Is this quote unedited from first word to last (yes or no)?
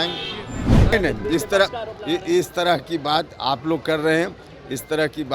no